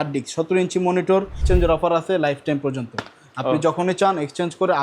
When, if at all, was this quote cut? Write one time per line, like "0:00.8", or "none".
0:01.4